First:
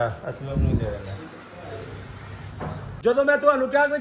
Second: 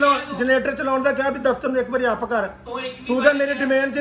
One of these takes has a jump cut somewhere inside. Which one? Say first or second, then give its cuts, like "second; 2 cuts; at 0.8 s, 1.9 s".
first; 1 cut; at 2.9 s